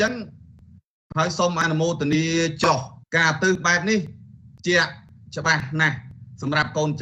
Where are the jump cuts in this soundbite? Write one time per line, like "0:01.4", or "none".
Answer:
0:03.0